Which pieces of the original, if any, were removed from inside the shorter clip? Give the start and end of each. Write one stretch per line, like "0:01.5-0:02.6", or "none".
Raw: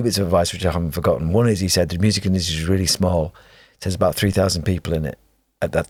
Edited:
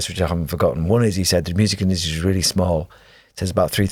none